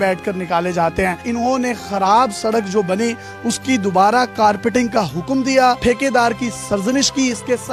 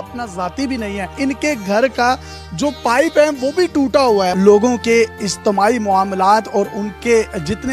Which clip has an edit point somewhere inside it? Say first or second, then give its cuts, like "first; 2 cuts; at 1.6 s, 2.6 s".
second; 2 cuts; at 1.1 s, 4.3 s